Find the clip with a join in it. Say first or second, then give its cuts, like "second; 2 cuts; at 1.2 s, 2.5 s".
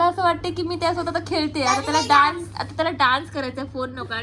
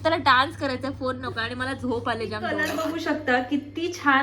second; 1 cut; at 2.5 s